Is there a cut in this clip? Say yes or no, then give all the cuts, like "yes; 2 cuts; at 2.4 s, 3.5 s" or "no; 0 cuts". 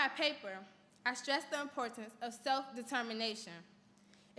no; 0 cuts